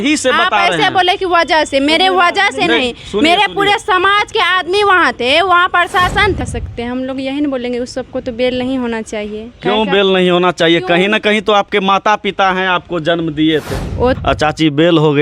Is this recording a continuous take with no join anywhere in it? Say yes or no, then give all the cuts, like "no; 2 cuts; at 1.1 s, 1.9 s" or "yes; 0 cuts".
no; 2 cuts; at 6.4 s, 14.2 s